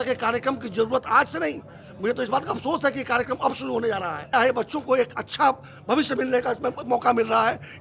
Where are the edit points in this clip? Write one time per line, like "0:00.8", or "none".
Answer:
0:04.3